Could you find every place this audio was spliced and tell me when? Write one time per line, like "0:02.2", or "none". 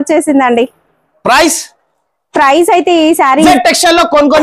0:03.5